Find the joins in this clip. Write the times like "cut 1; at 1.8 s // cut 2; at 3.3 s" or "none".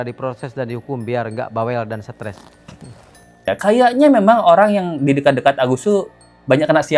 cut 1; at 3.5 s